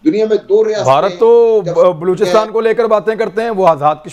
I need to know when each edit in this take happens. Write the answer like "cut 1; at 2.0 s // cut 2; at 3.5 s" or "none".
none